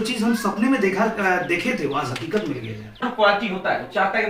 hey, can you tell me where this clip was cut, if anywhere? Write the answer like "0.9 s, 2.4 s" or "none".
3.0 s